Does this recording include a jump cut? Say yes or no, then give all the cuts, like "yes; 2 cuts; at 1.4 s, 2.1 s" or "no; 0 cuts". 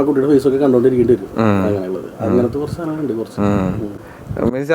no; 0 cuts